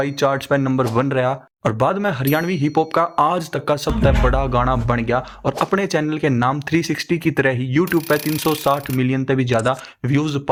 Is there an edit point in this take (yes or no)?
no